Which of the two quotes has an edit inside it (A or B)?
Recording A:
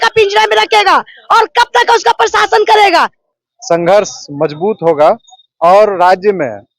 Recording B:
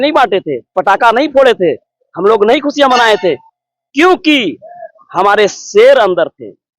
A